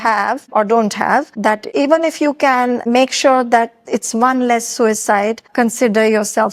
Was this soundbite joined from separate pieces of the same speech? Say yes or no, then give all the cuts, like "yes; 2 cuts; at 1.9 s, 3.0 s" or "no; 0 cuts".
no; 0 cuts